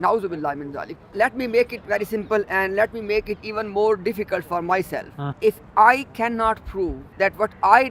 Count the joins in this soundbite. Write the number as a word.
three